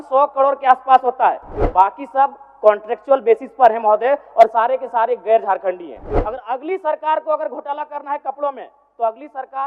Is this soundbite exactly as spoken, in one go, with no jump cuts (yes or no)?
no